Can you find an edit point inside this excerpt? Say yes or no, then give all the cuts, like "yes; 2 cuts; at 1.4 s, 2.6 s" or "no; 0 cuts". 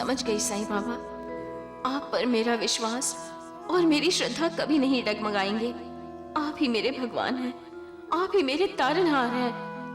no; 0 cuts